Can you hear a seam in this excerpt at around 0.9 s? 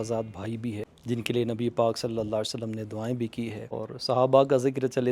yes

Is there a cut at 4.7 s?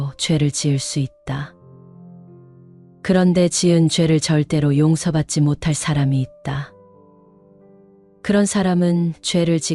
no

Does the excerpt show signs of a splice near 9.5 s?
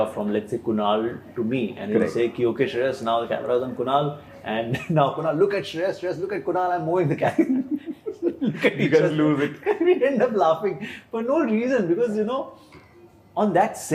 no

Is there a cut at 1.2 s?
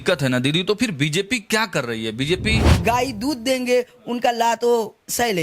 no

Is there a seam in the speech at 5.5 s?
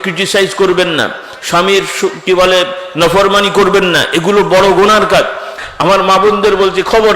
yes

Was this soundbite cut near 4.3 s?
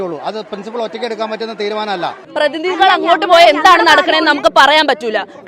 no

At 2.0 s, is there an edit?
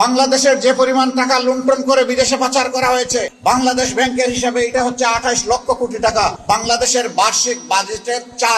no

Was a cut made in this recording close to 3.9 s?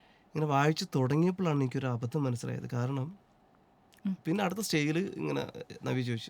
yes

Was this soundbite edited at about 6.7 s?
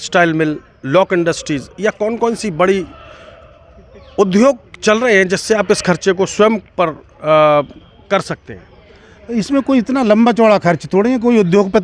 no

